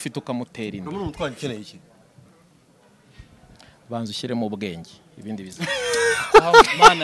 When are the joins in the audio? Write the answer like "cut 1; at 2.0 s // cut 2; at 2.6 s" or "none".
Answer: none